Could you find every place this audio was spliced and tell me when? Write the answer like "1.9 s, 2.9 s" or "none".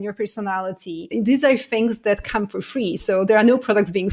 1.1 s